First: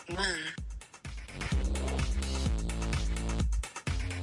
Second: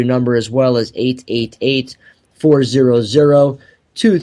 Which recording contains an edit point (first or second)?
second